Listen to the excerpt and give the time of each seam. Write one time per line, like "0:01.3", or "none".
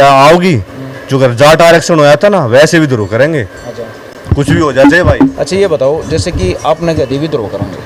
none